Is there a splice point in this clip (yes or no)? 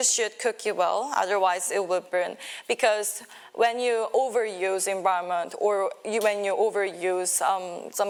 no